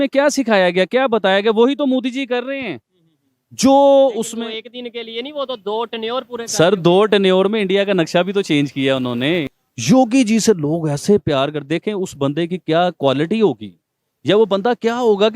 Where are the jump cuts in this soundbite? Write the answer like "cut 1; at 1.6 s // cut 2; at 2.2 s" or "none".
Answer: cut 1; at 9.5 s